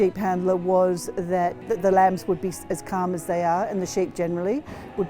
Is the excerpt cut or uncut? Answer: cut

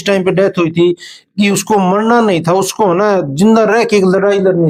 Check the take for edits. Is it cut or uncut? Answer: uncut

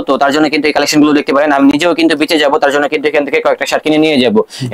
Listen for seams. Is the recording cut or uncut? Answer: uncut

